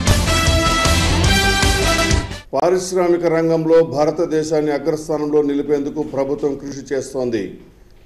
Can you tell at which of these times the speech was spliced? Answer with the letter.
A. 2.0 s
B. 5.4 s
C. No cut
A